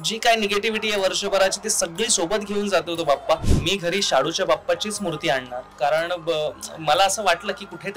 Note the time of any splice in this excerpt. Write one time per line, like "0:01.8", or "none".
0:03.5